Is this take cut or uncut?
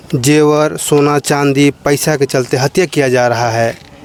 uncut